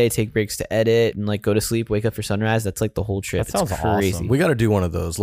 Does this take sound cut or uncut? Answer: cut